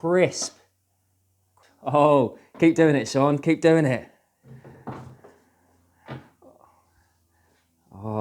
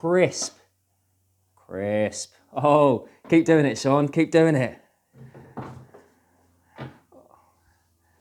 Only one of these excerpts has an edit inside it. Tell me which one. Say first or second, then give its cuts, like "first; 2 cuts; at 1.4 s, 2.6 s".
first; 1 cut; at 1.6 s